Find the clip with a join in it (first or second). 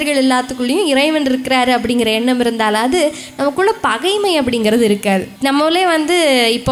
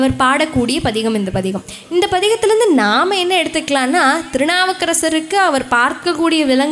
first